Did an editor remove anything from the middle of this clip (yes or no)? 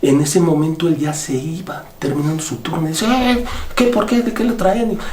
no